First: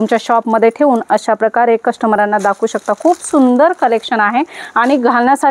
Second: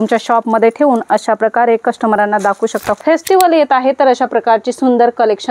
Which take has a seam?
second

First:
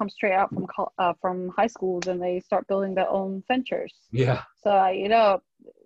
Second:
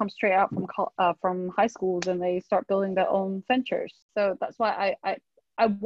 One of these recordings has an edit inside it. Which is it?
second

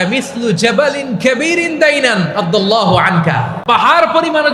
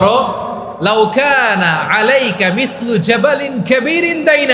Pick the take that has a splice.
first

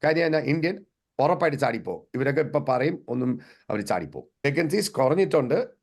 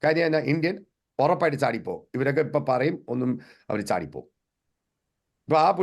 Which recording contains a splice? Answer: first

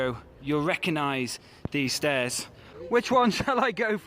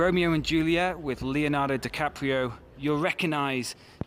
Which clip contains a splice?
first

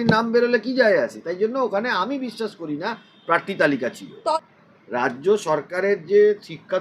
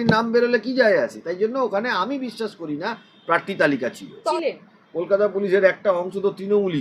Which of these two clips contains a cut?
first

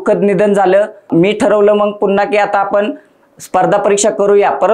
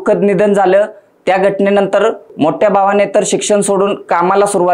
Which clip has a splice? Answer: first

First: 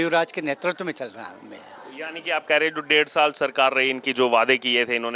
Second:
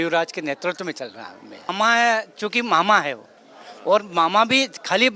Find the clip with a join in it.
second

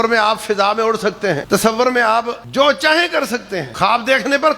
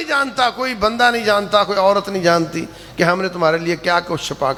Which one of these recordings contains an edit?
first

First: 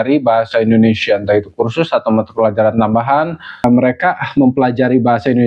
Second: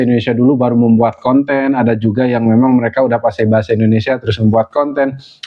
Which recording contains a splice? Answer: first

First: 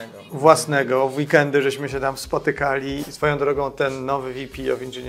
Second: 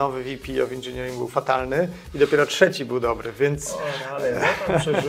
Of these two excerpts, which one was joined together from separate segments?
first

